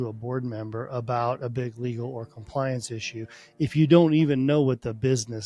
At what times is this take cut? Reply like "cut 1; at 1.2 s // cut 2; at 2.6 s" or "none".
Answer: none